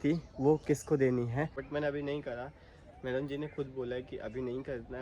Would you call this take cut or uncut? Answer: cut